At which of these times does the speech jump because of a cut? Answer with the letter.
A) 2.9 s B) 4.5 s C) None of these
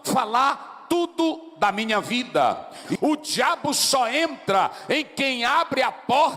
A